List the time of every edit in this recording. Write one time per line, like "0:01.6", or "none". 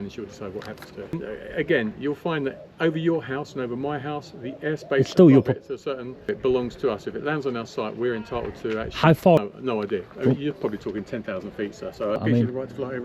0:01.1
0:06.3
0:09.4
0:12.2